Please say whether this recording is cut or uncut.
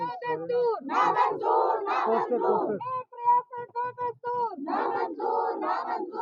uncut